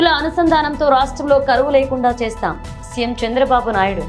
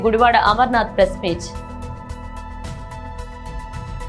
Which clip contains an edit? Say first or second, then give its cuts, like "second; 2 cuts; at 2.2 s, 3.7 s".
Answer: second; 1 cut; at 1.4 s